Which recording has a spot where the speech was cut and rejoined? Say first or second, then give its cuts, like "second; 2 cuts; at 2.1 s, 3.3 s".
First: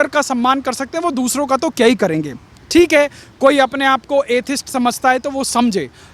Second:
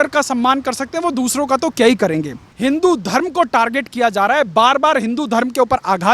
second; 1 cut; at 2.5 s